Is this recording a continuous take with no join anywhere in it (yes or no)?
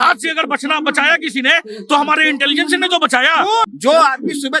no